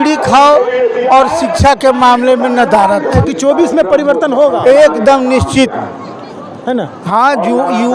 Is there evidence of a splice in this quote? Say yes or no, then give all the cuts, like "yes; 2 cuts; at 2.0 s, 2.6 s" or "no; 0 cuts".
yes; 1 cut; at 3.2 s